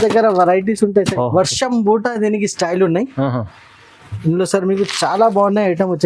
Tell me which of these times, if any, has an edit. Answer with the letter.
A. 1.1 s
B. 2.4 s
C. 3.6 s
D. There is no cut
A